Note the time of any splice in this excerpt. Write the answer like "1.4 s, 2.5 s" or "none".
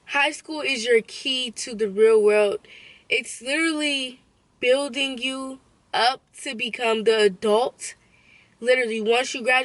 none

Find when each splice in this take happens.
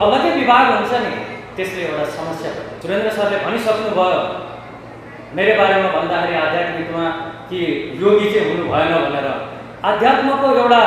2.7 s

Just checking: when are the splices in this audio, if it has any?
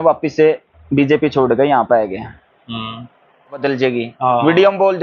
3.6 s

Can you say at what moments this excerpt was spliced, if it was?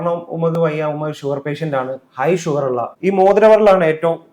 2.9 s

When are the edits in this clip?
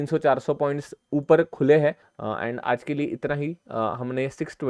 2.1 s

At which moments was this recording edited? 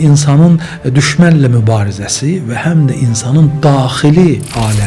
none

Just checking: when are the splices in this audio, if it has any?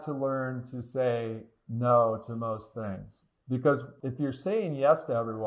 3.9 s

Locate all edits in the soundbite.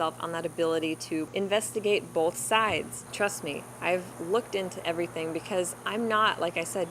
1.3 s, 3.0 s

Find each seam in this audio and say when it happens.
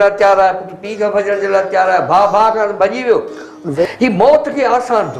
3.8 s

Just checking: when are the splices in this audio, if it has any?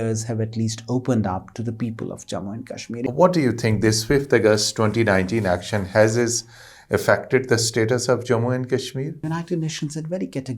3.0 s, 9.3 s

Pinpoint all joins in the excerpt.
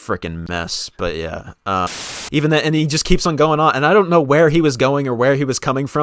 2.0 s

